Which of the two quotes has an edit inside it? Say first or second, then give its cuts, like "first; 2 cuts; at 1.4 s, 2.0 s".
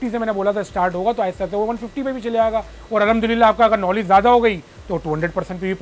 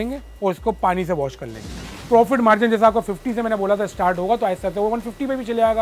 second; 1 cut; at 1.9 s